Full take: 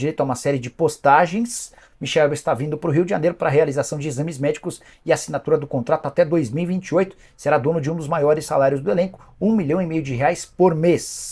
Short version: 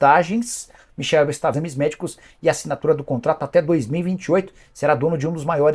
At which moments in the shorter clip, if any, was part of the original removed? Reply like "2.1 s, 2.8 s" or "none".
1.6 s